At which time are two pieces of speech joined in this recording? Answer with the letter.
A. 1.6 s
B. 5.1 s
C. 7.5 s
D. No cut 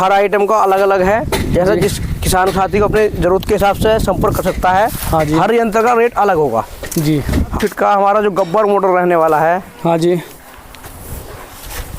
C